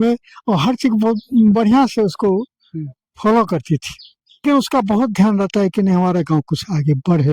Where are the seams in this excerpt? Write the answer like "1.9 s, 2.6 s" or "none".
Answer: 4.4 s